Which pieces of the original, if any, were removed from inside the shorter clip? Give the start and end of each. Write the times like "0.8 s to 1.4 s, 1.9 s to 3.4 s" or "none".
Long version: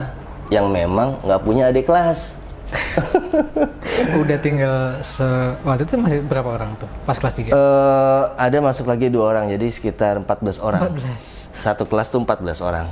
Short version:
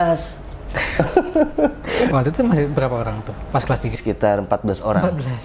4.1 s to 5.6 s, 7.5 s to 9.7 s